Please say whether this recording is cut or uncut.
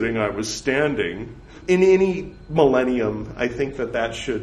cut